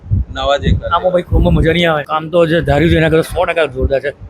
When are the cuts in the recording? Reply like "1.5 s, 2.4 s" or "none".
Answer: 2.1 s